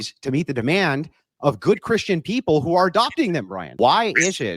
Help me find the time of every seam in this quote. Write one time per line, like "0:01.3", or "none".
0:03.6